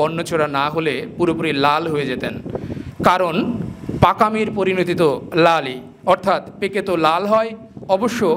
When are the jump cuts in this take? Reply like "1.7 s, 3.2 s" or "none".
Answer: none